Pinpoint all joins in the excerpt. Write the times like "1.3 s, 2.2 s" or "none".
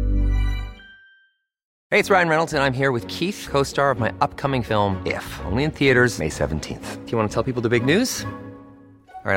1.7 s